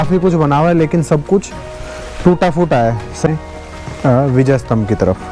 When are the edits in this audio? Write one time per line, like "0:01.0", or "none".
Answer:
0:03.3